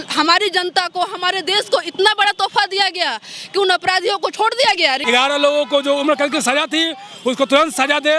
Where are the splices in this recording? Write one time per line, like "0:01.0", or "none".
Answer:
0:05.0